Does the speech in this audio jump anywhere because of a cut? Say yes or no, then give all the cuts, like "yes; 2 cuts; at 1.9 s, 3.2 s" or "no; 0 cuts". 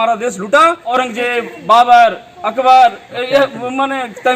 yes; 1 cut; at 0.9 s